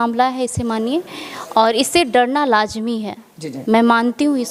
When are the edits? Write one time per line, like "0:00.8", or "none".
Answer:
none